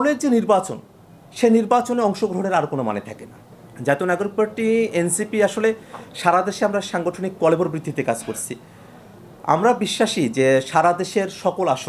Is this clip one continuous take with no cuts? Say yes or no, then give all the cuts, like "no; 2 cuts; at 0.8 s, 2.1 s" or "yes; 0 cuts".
yes; 0 cuts